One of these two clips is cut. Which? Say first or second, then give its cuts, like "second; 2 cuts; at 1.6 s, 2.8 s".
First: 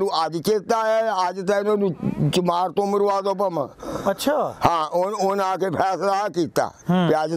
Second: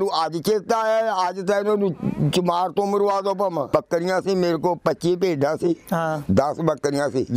second; 1 cut; at 3.7 s